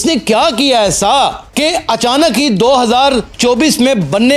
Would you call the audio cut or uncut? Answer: uncut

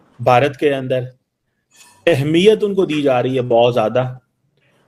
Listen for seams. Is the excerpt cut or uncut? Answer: uncut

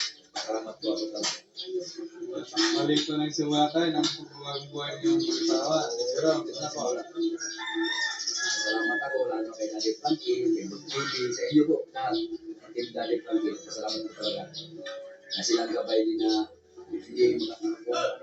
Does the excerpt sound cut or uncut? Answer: uncut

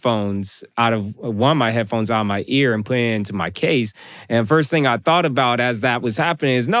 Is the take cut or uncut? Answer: uncut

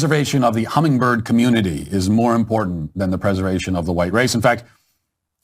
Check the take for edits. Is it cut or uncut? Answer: uncut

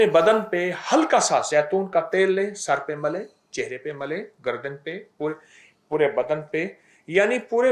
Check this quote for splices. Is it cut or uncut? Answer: uncut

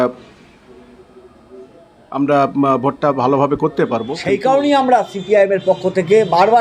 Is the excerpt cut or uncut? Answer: cut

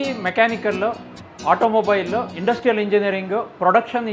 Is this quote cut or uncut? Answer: cut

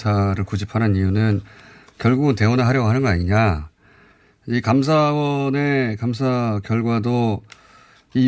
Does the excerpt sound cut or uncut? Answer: cut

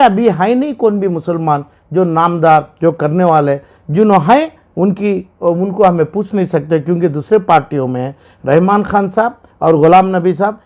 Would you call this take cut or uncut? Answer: uncut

